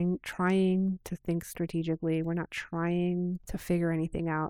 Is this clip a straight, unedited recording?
no; 1 cut; at 3.5 s

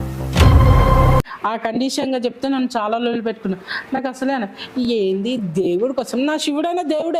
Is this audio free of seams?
yes; 0 cuts

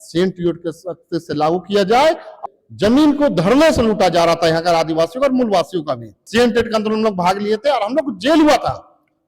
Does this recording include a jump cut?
yes; 2 cuts; at 2.3 s, 6.1 s

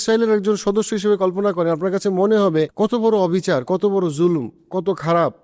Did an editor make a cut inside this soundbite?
yes; 1 cut; at 2.7 s

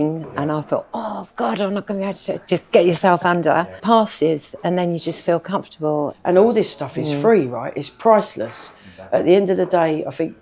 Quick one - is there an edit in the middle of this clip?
yes; 2 cuts; at 3.8 s, 6.1 s

